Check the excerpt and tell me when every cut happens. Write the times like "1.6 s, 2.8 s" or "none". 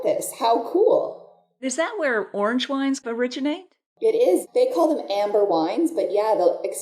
1.6 s, 3.0 s, 4.4 s